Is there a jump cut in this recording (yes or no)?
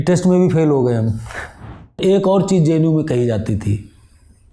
yes